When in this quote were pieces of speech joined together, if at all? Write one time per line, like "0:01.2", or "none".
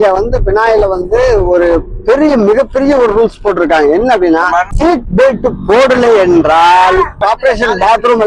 0:04.7
0:07.2